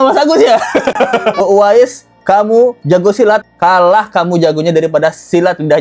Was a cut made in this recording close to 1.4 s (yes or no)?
yes